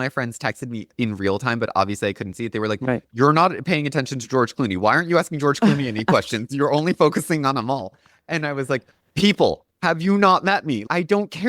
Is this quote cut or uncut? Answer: uncut